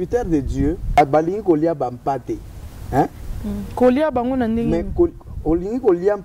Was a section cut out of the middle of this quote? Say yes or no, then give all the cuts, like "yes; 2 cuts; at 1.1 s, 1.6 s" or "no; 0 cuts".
yes; 1 cut; at 1.0 s